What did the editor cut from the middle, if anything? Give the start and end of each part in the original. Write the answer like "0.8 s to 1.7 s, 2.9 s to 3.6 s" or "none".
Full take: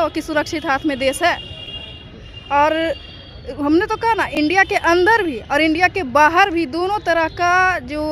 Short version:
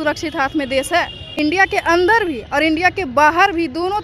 1.6 s to 4.3 s